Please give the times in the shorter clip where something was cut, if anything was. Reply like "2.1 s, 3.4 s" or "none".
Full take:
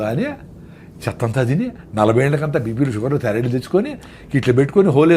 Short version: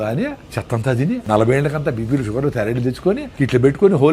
1.0 s, 3.3 s